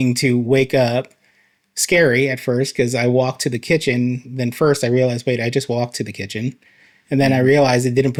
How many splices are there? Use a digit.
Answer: 0